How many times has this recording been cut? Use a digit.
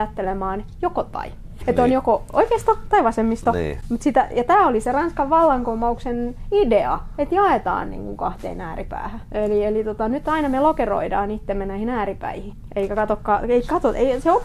3